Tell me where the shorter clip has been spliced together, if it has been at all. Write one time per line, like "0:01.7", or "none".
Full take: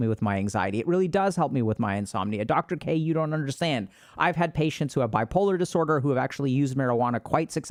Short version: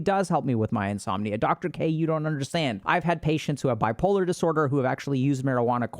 0:02.8